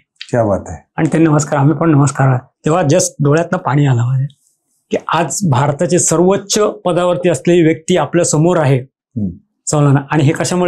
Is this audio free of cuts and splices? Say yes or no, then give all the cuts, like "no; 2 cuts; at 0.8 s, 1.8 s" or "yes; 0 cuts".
yes; 0 cuts